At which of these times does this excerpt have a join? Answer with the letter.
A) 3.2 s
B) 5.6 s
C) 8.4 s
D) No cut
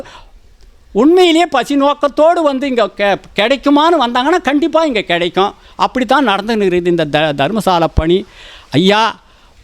D